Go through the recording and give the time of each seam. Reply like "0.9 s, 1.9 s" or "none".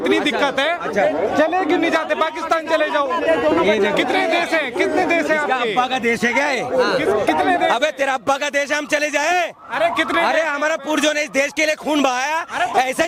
none